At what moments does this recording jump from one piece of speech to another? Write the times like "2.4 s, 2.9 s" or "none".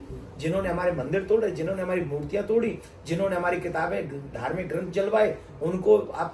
none